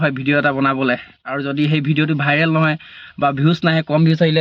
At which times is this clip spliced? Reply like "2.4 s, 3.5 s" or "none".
none